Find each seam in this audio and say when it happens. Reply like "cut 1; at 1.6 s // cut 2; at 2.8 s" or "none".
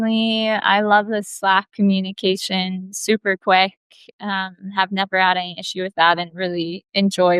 none